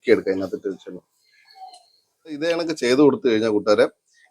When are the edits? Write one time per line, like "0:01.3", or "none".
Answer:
0:02.4